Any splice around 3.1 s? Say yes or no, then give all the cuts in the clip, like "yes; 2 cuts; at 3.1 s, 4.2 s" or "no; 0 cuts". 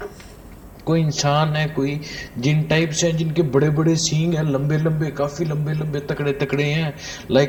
no; 0 cuts